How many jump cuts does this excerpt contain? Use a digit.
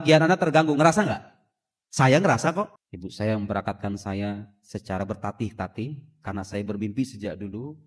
1